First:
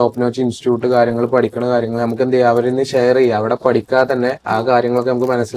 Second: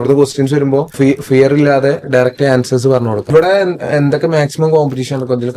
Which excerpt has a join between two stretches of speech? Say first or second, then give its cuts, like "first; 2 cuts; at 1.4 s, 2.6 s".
second; 2 cuts; at 0.9 s, 3.3 s